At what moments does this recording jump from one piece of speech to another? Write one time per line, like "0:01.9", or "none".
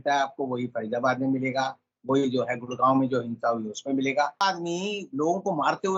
0:04.4

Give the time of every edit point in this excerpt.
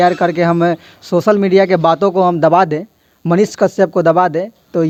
none

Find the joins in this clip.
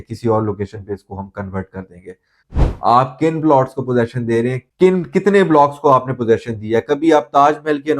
0:02.4

